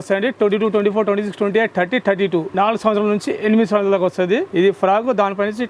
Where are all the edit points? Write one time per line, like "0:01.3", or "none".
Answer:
0:02.5
0:04.5